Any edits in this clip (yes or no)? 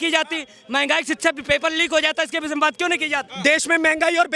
yes